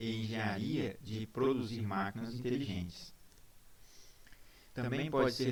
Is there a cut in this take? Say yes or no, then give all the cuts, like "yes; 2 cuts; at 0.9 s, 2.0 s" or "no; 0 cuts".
no; 0 cuts